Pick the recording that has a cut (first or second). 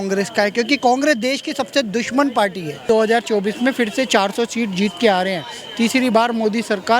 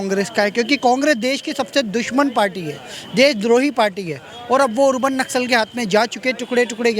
first